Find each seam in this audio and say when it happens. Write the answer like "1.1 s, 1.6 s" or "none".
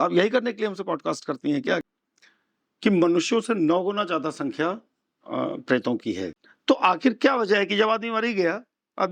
1.9 s, 6.4 s